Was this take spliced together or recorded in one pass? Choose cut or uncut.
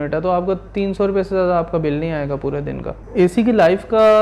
cut